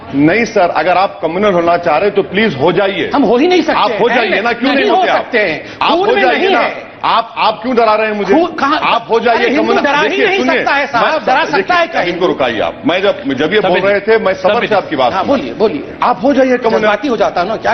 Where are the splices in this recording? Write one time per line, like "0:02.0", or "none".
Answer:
none